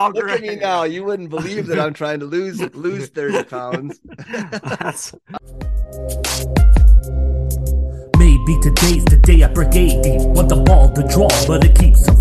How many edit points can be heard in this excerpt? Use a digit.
1